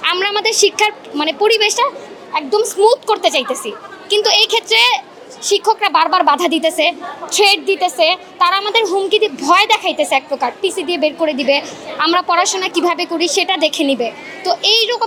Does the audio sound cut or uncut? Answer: uncut